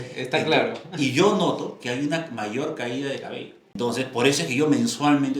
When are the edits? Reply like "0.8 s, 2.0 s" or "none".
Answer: 3.7 s